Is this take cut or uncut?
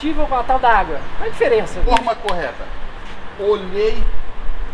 cut